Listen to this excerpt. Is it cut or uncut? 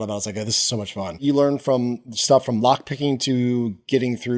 cut